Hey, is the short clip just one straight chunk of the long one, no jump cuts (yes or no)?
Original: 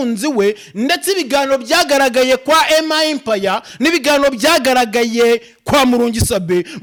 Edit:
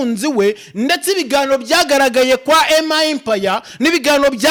yes